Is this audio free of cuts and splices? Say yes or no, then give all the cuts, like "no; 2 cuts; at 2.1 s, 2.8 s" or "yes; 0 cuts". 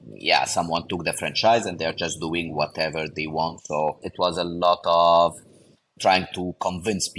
no; 1 cut; at 4.1 s